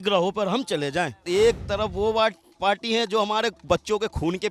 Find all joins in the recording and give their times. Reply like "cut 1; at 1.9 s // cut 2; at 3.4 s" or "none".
cut 1; at 1.2 s